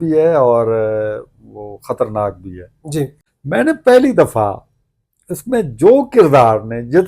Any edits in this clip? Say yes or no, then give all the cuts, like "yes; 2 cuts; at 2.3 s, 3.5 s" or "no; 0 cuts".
yes; 1 cut; at 3.3 s